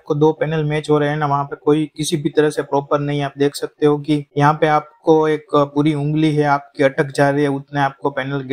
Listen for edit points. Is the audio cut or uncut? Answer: uncut